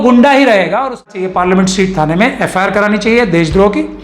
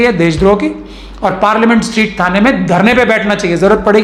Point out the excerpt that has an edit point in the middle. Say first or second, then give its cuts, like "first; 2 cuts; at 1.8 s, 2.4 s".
first; 1 cut; at 1.0 s